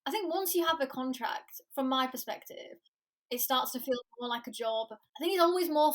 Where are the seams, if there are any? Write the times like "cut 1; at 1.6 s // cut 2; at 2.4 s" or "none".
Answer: cut 1; at 5.0 s